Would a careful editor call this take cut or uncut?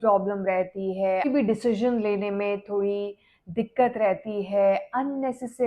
cut